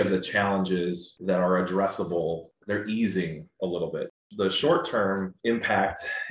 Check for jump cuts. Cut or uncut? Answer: cut